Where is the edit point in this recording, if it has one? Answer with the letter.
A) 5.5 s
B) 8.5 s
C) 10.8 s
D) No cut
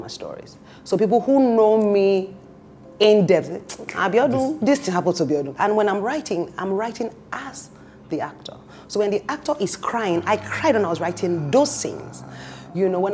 A